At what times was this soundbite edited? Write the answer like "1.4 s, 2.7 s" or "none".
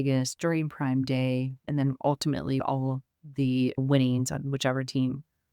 1.6 s, 2.6 s